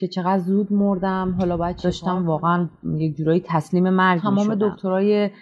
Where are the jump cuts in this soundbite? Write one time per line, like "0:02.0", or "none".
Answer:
0:01.8
0:04.2